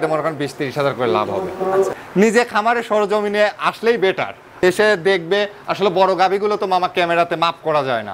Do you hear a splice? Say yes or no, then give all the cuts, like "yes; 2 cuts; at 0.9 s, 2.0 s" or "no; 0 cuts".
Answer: yes; 2 cuts; at 2.0 s, 4.4 s